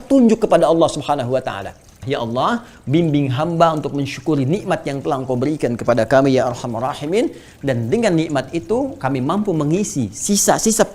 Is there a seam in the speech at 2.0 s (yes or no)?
yes